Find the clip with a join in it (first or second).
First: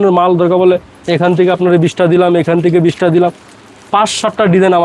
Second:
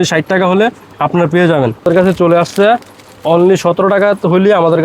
second